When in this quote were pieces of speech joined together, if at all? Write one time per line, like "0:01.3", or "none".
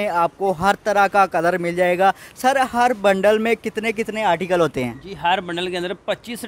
none